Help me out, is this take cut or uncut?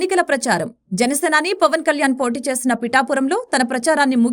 uncut